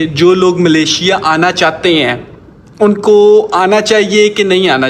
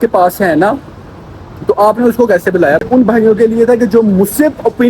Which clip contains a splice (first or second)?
second